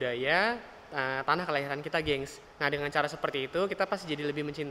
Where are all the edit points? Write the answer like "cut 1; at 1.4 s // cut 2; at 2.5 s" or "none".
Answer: cut 1; at 2.4 s